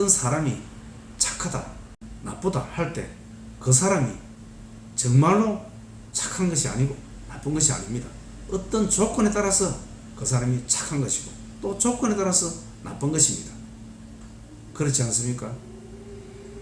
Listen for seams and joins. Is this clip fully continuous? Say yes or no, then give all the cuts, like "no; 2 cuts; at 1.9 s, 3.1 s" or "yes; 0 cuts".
no; 1 cut; at 2.0 s